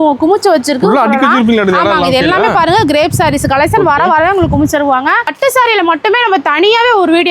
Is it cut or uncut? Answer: cut